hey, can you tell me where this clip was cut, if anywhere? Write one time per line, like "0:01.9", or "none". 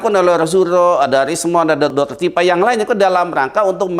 0:01.9